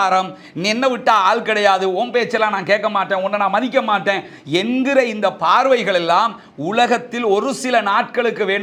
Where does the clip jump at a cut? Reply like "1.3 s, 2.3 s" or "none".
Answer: none